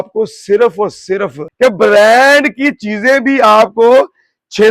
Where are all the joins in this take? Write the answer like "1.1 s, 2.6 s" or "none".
1.4 s